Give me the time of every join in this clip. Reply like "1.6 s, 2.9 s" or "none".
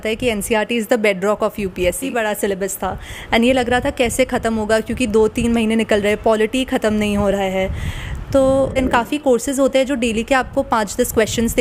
2.0 s, 8.7 s